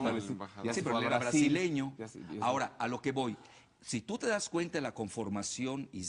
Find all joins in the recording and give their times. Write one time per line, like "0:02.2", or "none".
0:02.7